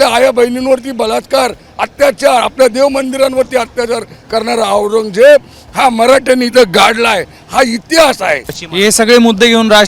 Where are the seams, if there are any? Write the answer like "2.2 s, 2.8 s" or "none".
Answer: 8.6 s